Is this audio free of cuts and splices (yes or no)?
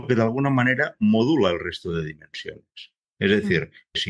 yes